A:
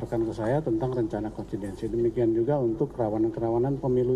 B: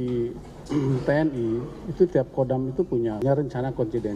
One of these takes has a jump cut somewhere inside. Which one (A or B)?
B